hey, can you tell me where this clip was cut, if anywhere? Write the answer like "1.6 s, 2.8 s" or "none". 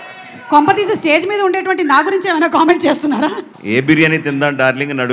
3.5 s